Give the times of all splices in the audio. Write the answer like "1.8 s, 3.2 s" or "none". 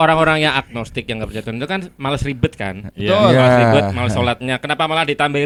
none